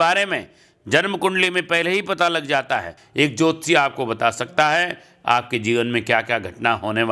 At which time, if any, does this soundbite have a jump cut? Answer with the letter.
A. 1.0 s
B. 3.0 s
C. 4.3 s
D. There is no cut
B